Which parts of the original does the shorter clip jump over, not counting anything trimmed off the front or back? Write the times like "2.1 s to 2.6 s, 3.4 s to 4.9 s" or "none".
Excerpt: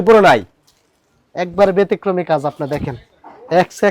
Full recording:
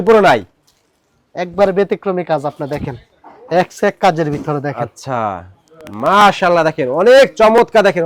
none